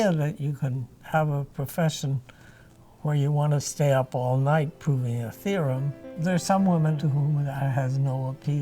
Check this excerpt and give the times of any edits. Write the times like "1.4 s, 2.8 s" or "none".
6.0 s, 7.0 s